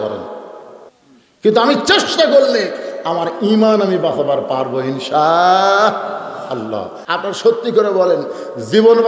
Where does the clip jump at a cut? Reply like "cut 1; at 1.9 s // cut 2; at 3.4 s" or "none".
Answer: cut 1; at 7.0 s

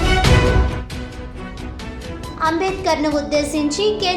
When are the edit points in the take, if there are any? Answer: cut 1; at 2.4 s

